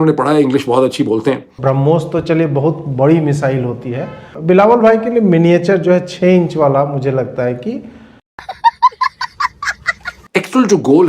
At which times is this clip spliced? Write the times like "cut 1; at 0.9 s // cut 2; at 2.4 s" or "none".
cut 1; at 1.5 s // cut 2; at 4.3 s // cut 3; at 10.1 s